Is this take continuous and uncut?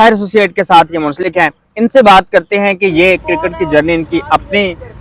yes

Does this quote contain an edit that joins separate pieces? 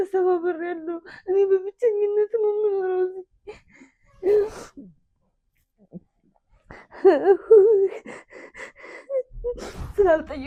no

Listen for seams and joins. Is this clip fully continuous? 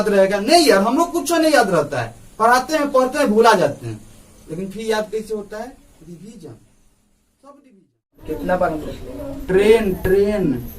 no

